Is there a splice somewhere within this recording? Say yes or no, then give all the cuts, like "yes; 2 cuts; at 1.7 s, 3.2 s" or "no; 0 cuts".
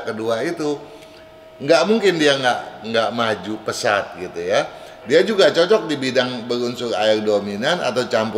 no; 0 cuts